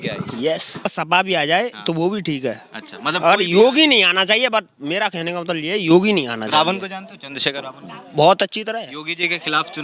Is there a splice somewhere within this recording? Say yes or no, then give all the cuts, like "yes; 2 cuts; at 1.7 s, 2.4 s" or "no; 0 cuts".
yes; 1 cut; at 0.9 s